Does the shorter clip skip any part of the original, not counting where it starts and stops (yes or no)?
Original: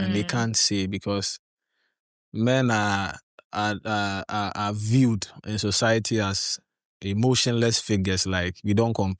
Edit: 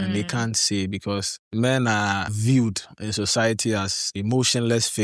yes